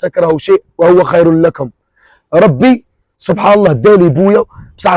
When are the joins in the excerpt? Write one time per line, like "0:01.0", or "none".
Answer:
none